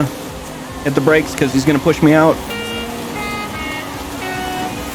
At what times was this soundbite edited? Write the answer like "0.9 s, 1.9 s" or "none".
2.5 s